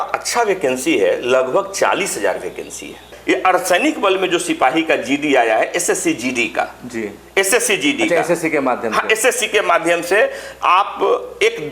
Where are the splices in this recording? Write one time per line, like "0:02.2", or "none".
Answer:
0:03.1